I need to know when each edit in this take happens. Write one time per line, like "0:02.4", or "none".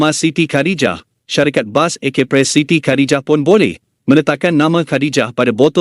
none